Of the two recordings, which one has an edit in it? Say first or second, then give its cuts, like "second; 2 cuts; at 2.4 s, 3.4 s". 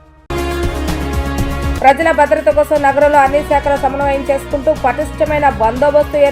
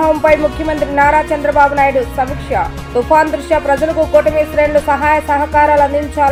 first; 1 cut; at 1.7 s